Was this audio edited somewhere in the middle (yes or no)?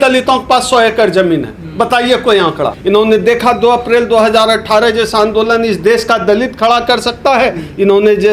yes